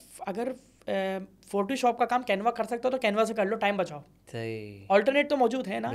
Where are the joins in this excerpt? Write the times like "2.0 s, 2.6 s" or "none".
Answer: none

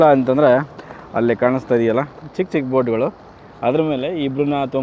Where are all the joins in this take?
none

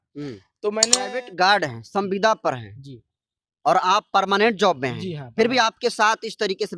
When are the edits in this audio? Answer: 1.0 s

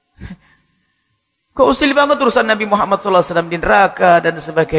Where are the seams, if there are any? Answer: none

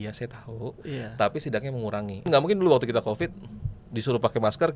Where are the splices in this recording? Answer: 2.2 s

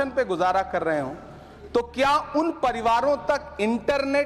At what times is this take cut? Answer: none

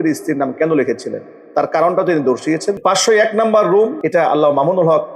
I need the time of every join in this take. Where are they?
2.8 s, 4.0 s

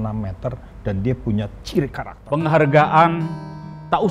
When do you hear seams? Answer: 2.1 s

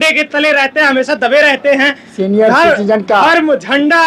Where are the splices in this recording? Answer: none

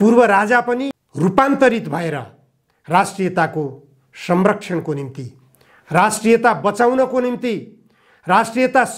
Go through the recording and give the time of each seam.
1.0 s

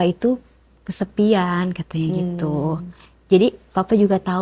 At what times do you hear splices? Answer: none

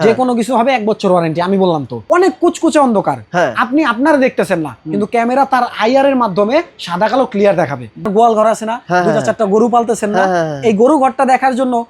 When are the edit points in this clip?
1.9 s, 8.0 s

